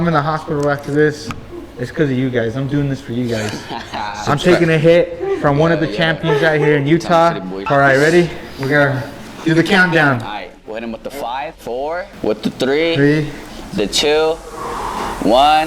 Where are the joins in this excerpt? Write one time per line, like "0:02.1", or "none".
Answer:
0:07.5
0:12.1